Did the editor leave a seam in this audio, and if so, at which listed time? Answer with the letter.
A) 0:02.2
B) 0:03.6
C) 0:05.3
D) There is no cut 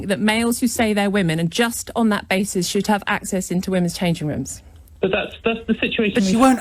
D